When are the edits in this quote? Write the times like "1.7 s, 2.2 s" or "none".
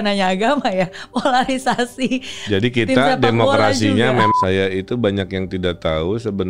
4.3 s